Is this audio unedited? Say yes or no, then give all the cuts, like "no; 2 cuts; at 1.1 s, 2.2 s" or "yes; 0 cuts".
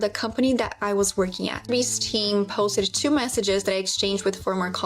no; 1 cut; at 1.5 s